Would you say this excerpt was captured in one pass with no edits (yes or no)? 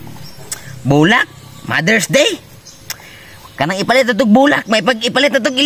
yes